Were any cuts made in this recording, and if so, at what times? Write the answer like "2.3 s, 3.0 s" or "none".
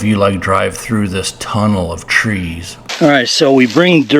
2.8 s